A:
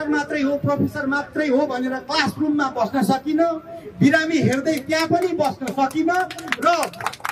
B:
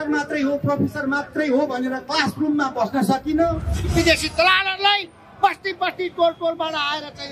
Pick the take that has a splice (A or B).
B